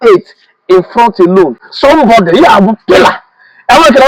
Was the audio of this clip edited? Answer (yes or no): no